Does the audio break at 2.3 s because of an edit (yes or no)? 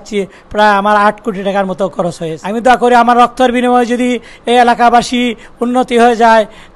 yes